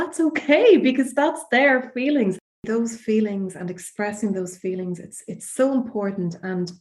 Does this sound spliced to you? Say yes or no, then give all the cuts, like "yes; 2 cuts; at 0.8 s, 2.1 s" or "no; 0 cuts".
yes; 1 cut; at 2.7 s